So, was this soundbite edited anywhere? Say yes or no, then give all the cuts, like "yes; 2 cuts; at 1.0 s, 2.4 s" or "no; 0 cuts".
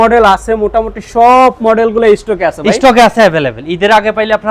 no; 0 cuts